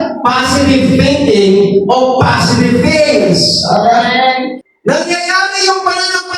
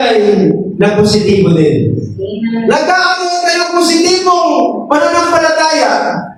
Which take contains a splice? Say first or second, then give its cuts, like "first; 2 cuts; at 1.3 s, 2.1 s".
first; 1 cut; at 4.6 s